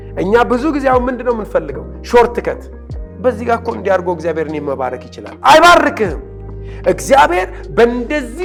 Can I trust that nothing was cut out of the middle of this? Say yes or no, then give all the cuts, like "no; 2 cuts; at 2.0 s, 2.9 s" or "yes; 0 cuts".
yes; 0 cuts